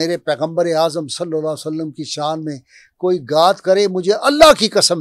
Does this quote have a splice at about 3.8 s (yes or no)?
no